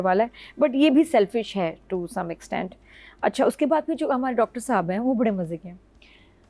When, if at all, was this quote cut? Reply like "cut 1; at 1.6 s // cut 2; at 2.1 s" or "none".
none